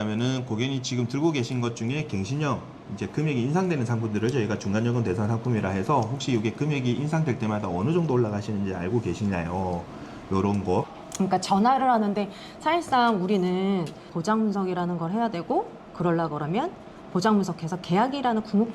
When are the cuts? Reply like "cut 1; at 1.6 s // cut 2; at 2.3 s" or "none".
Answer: cut 1; at 11.0 s // cut 2; at 14.1 s